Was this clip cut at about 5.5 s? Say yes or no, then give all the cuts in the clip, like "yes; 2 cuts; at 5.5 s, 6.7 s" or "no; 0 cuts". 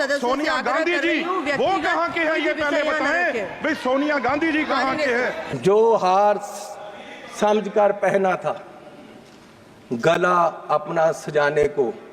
yes; 1 cut; at 5.5 s